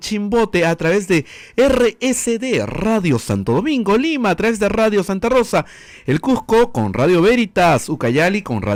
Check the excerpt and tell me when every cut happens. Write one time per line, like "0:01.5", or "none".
none